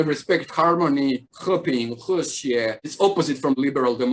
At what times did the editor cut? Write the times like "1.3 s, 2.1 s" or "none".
none